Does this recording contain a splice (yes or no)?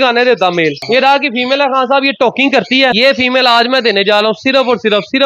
yes